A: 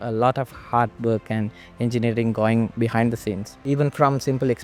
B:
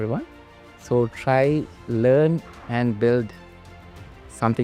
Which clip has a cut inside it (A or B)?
A